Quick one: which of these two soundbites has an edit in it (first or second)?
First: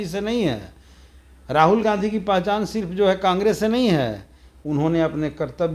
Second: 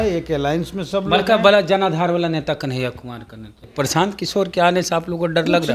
second